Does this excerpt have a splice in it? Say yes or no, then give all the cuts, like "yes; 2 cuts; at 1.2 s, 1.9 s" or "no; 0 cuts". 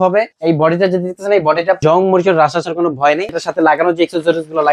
yes; 2 cuts; at 1.8 s, 3.3 s